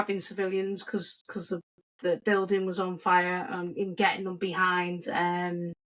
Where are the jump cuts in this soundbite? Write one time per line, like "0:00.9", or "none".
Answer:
none